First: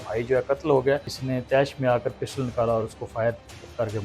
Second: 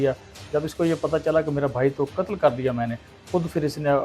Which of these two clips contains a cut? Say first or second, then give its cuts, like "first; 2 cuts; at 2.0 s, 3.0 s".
first; 1 cut; at 1.2 s